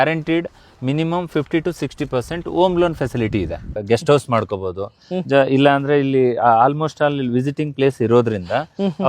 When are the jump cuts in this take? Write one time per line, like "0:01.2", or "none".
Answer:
0:03.7